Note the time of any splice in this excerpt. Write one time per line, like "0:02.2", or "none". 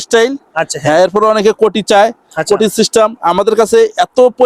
none